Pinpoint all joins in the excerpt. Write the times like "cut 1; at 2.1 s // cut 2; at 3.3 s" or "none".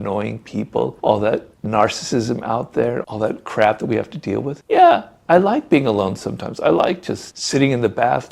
cut 1; at 0.9 s